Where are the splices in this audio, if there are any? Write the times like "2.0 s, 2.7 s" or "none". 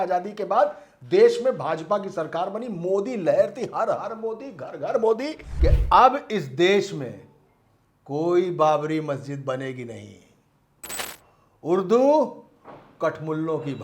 5.4 s